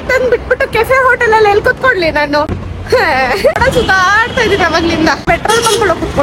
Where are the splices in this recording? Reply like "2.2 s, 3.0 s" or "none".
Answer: 2.7 s, 3.6 s, 5.2 s